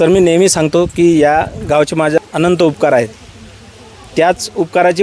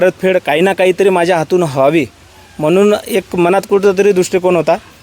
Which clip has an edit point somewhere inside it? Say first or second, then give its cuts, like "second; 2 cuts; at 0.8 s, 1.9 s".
first; 1 cut; at 2.2 s